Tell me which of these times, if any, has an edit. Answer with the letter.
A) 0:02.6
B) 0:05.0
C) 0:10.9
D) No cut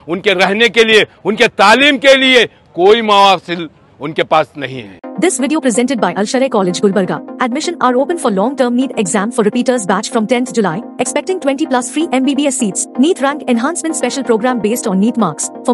B